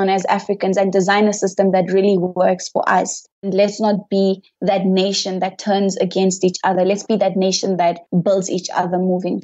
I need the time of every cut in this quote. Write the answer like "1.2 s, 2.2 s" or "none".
3.5 s, 8.0 s

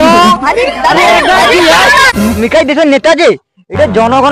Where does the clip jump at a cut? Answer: 2.1 s

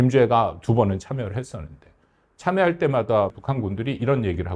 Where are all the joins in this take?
3.4 s

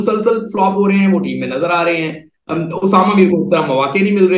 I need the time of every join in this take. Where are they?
none

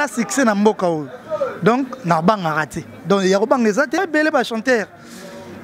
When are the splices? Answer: 4.0 s

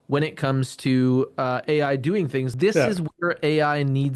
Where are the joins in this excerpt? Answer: 2.5 s

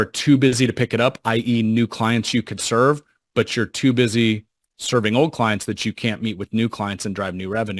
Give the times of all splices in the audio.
none

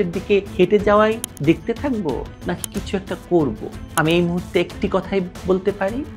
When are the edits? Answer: none

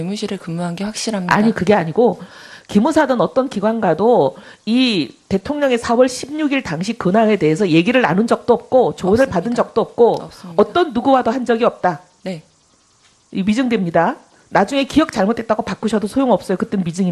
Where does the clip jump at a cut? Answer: 6.7 s

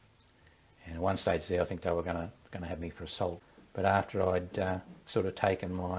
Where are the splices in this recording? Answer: 3.5 s

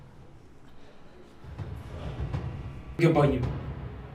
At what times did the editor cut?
3.0 s

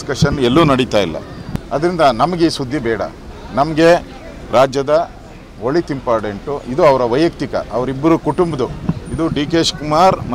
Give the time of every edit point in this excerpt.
2.1 s

